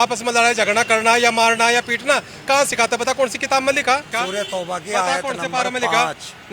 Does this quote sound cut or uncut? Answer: cut